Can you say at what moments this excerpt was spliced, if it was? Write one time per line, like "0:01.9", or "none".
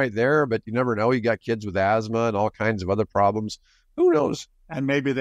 none